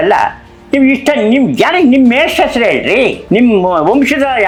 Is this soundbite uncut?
yes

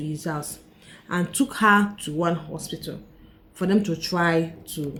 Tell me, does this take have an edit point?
no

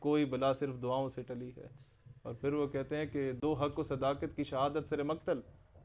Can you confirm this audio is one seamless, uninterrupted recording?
no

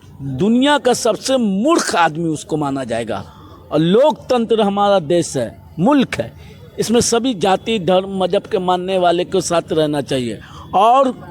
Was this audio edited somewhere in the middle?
no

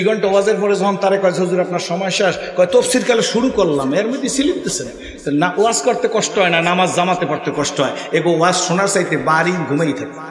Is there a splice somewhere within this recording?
no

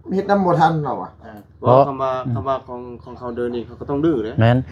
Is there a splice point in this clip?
no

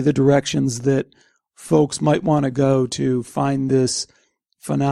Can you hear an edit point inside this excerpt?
no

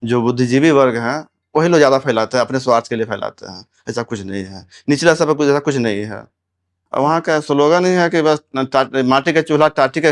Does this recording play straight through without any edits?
no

